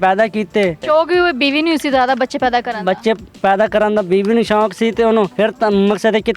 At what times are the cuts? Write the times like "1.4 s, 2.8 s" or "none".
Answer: 0.8 s, 5.3 s